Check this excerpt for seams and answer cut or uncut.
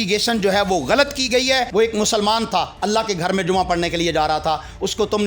cut